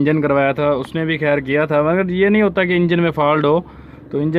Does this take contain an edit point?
no; 0 cuts

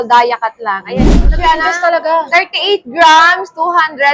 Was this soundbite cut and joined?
yes; 1 cut; at 1.2 s

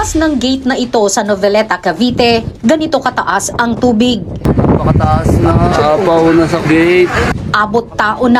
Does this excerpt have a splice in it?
no; 0 cuts

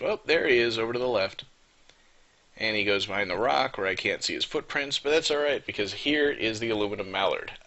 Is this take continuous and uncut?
no; 1 cut; at 1.5 s

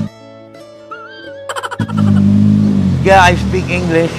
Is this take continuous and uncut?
yes; 0 cuts

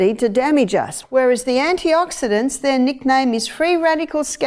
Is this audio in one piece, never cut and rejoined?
no; 1 cut; at 1.0 s

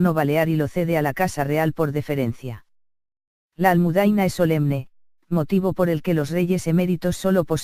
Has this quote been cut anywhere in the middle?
no; 0 cuts

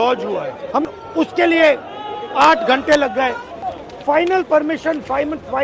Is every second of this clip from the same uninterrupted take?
no; 2 cuts; at 0.8 s, 3.5 s

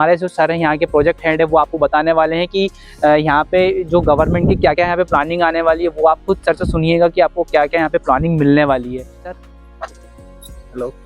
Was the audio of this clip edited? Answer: yes; 1 cut; at 9.4 s

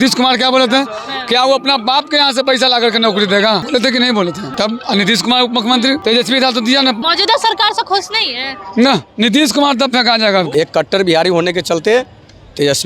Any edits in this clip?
yes; 5 cuts; at 3.6 s, 4.5 s, 6.0 s, 7.0 s, 10.5 s

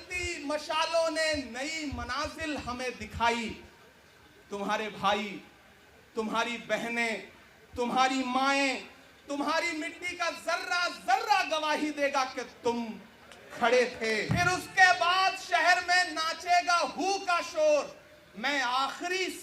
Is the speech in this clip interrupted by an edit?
yes; 1 cut; at 14.3 s

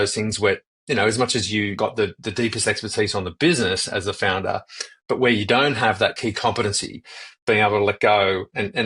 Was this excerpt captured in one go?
no; 2 cuts; at 1.7 s, 6.2 s

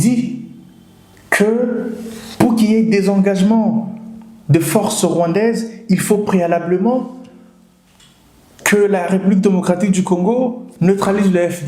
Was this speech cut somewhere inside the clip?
no; 0 cuts

